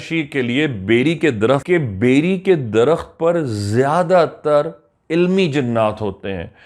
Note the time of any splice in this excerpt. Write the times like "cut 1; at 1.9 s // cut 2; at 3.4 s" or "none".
cut 1; at 1.6 s